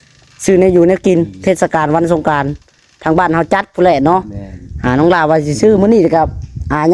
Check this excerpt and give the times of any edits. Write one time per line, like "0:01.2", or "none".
none